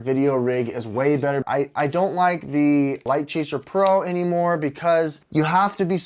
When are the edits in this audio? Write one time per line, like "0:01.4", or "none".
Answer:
0:01.4
0:03.0
0:05.2